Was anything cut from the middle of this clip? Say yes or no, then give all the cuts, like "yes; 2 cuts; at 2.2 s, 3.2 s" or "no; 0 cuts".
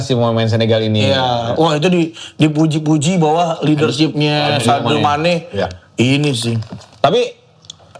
no; 0 cuts